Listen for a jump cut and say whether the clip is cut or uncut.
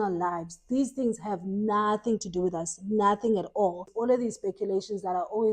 cut